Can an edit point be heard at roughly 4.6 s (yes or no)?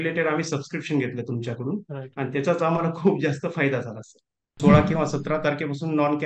yes